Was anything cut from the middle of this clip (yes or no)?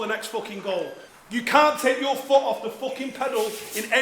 yes